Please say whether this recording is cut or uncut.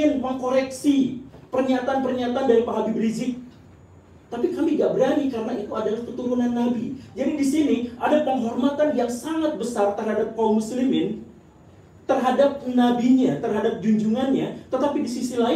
uncut